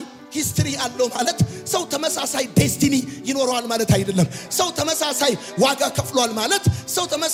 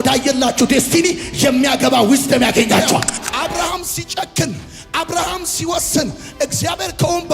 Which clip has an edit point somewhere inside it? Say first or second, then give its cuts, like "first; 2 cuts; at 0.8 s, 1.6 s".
second; 1 cut; at 3.2 s